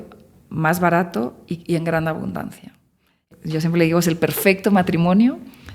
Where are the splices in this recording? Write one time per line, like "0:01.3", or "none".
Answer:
0:03.2